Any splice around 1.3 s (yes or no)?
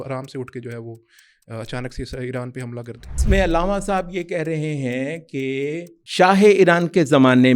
no